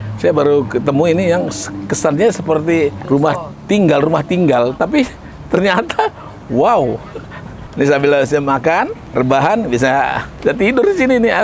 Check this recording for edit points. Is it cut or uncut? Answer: cut